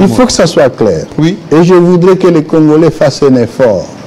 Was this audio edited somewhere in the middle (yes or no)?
no